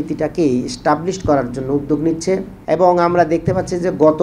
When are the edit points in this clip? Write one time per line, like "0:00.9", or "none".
0:02.5